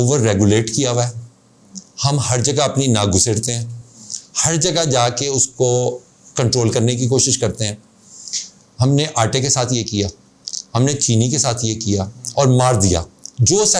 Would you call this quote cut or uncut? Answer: uncut